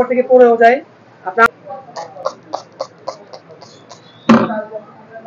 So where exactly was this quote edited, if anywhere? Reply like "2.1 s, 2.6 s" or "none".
1.5 s